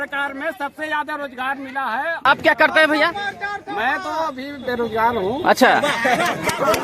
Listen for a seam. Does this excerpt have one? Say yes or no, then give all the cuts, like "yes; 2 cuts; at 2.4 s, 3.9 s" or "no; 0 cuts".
yes; 1 cut; at 2.2 s